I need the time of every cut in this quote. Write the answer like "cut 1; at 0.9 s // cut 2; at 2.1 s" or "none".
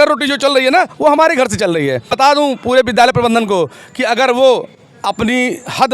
cut 1; at 2.1 s